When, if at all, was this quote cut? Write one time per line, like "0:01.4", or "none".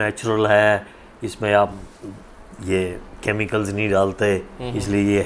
none